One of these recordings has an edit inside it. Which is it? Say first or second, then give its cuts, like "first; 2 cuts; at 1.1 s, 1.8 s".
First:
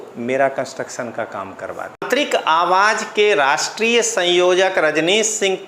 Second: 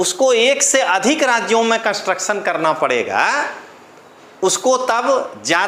first; 1 cut; at 2.1 s